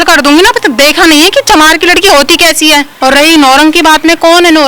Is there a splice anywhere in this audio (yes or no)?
yes